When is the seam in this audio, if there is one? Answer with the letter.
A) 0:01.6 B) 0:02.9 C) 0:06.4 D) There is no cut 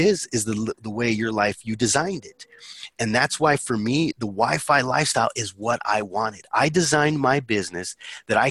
D